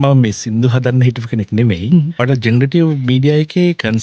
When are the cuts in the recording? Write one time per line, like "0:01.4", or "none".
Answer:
0:02.1